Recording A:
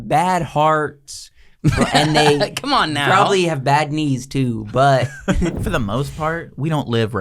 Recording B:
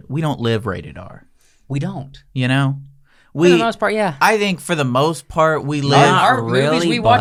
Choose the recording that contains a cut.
A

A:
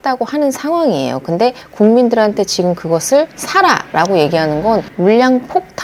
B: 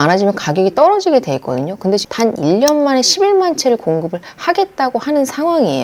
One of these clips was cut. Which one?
B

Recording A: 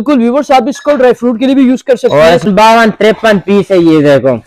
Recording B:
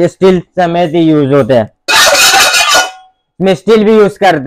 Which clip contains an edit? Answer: A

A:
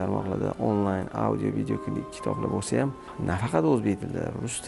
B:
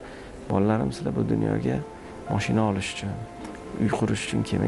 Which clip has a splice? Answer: A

